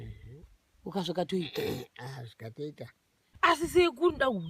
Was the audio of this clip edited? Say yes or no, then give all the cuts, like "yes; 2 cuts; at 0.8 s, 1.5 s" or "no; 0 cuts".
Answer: yes; 1 cut; at 3.3 s